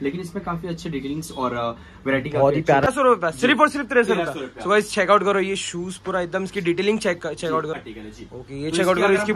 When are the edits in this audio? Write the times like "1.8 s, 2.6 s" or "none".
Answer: 2.9 s, 7.8 s